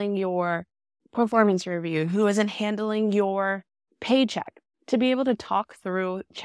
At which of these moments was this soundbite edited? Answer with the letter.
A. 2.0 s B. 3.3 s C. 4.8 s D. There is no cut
D